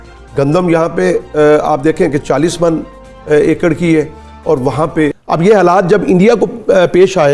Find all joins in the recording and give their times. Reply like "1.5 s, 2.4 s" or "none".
5.2 s

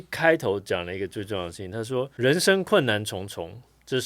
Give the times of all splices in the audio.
2.1 s

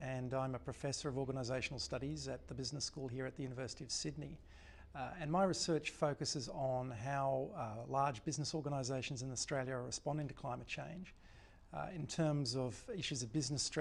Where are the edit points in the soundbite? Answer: none

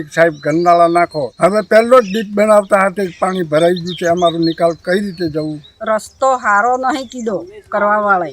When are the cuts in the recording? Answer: 1.2 s, 5.7 s

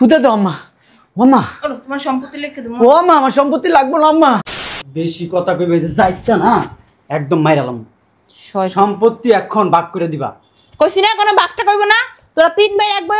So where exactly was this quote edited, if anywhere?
4.4 s

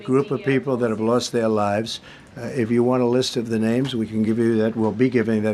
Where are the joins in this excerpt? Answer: none

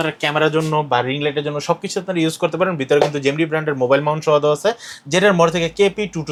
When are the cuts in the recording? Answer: none

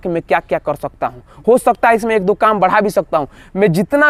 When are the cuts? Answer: none

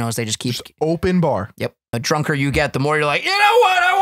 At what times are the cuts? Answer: 2.0 s

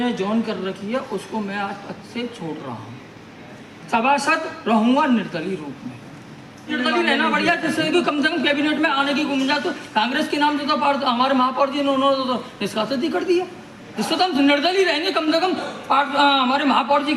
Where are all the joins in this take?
6.7 s

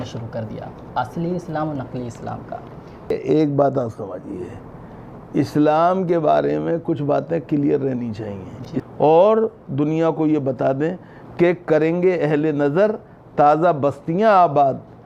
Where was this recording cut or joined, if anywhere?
3.1 s, 8.8 s

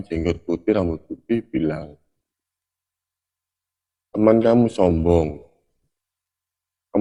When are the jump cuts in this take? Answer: none

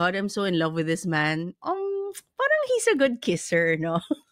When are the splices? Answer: 1.6 s

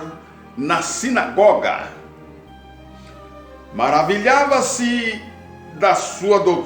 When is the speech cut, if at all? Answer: 2.2 s, 3.7 s

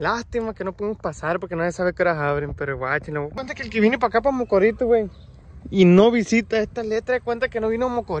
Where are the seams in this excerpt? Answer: 3.3 s

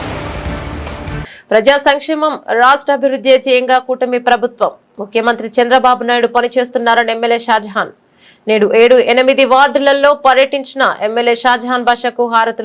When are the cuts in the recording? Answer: none

